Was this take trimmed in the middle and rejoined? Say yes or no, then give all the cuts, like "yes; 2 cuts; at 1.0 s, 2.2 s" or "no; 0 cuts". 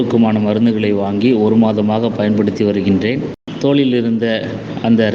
yes; 1 cut; at 3.4 s